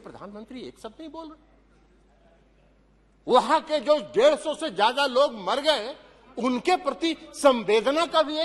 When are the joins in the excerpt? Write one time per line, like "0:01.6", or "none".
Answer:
none